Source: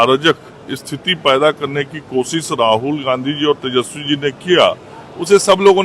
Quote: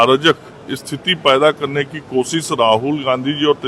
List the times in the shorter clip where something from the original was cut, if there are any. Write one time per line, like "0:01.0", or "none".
none